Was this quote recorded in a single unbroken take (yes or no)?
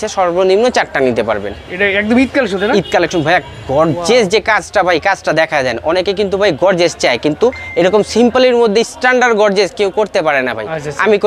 yes